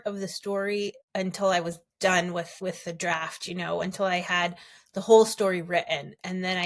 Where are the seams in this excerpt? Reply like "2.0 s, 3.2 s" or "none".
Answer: 1.0 s, 2.5 s